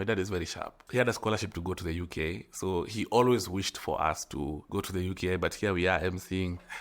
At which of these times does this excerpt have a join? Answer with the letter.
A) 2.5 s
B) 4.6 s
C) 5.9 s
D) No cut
B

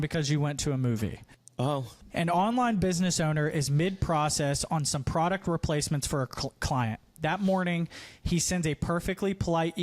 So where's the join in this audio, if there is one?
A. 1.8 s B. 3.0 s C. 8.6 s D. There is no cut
A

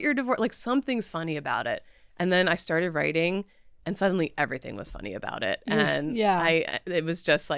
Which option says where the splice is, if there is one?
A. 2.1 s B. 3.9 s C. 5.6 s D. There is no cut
D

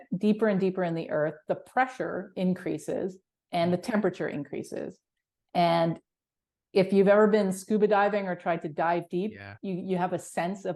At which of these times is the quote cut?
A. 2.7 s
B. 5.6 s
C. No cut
C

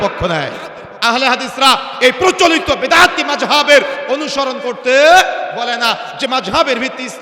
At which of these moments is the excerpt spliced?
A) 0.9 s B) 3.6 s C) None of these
A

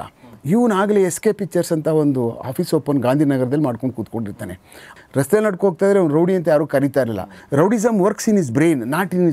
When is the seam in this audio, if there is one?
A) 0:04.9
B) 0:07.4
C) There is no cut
A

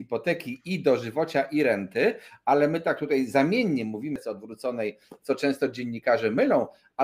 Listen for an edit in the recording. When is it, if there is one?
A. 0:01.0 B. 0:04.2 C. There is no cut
B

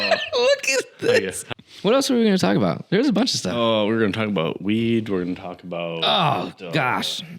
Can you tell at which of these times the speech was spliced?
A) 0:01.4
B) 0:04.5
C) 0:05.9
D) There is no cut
A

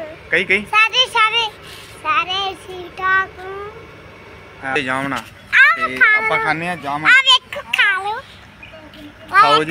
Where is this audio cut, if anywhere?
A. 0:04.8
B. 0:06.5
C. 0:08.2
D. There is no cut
A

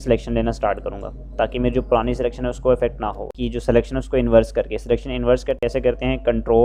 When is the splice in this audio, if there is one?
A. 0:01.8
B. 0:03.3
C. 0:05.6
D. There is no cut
B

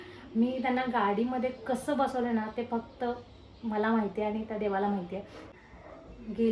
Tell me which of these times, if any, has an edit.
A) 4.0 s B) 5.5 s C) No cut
B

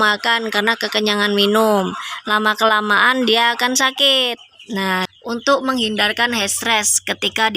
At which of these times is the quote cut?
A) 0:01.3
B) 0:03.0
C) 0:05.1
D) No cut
C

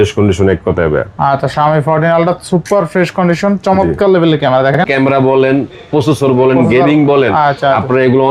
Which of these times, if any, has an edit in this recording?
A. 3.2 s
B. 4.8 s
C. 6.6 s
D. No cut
B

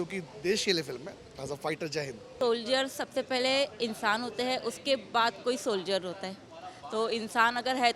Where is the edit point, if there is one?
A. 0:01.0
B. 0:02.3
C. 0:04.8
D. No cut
B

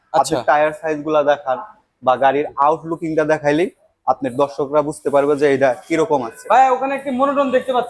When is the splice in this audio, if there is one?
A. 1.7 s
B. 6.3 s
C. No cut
B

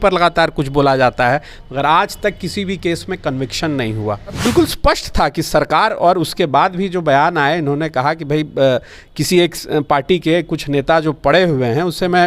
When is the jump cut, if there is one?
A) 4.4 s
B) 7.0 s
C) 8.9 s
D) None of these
A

